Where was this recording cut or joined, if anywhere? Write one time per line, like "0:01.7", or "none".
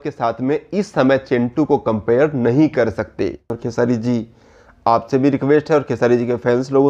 0:03.6